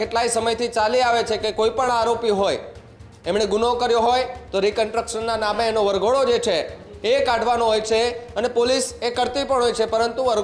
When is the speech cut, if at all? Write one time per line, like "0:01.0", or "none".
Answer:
none